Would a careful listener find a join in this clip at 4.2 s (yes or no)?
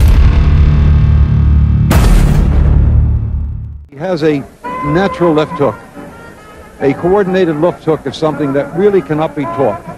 yes